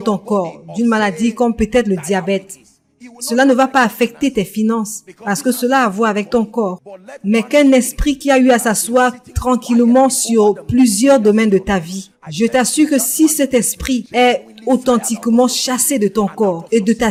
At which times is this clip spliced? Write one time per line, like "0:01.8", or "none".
none